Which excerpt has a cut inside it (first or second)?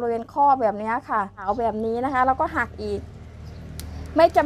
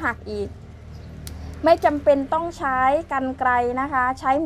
first